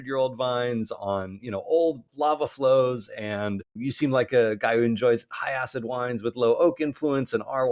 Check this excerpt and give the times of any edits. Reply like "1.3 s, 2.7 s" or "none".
2.1 s, 3.7 s